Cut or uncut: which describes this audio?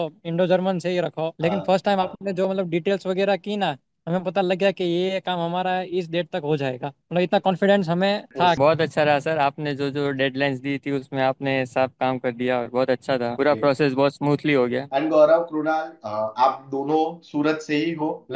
cut